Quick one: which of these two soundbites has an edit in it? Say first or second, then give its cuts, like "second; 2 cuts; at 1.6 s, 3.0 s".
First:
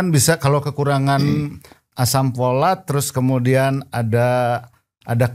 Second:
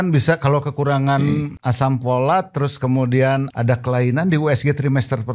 second; 2 cuts; at 1.6 s, 3.5 s